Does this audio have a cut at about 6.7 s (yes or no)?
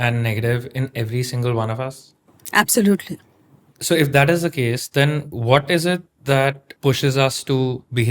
yes